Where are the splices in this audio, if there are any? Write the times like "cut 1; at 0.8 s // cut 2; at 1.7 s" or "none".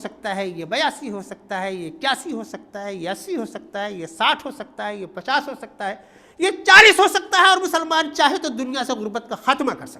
none